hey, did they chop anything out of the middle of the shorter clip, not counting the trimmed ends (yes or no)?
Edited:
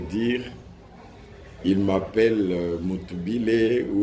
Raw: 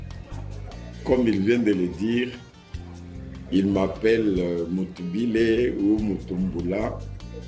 no